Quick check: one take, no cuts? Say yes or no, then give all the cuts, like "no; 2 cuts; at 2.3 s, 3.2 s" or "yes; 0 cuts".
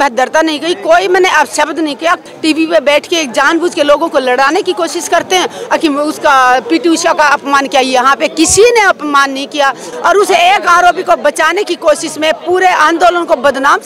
no; 2 cuts; at 2.2 s, 9.9 s